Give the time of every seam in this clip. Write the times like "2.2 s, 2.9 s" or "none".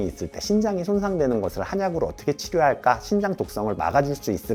none